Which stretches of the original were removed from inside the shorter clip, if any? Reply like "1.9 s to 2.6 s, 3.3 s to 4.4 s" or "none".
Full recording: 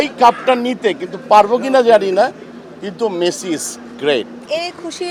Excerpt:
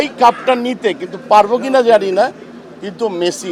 none

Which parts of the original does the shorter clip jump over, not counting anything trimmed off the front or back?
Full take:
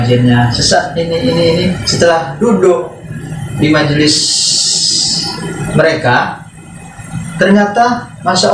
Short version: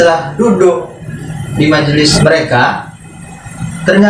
4.1 s to 5.7 s

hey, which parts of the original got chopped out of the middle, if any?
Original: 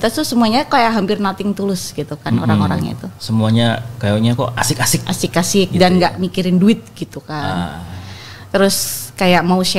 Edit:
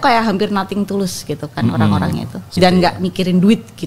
3.2 s to 5.7 s

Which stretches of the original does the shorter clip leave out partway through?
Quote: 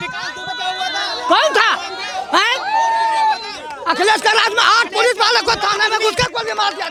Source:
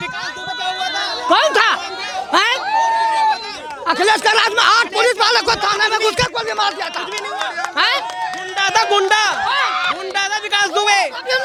none

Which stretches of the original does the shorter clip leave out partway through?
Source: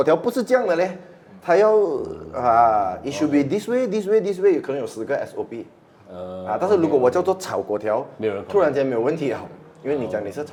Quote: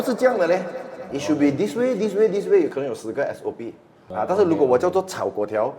1.3 s to 3.0 s, 5.9 s to 6.3 s

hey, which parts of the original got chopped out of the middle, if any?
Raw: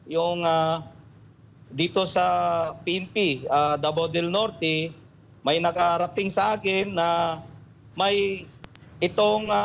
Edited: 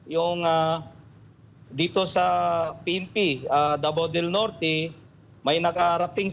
none

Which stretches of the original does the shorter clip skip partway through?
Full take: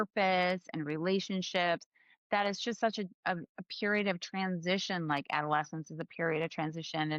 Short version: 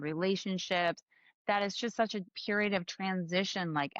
3.1 s to 3.6 s

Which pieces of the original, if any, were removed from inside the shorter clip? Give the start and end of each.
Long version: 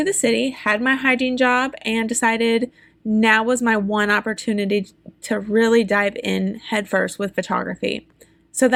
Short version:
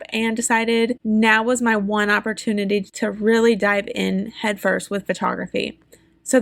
2.7 s to 3.0 s, 4.9 s to 5.2 s

